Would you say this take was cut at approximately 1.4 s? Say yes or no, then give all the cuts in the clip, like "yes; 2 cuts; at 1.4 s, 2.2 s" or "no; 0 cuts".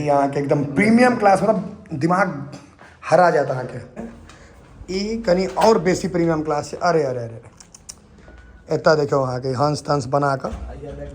no; 1 cut; at 4.0 s